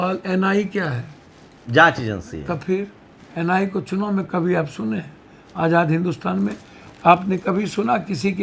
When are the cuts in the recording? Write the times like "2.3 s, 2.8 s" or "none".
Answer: none